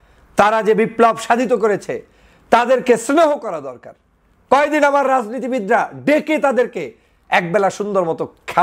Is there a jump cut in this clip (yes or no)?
no